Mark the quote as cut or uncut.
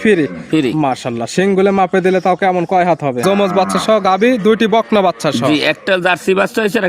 cut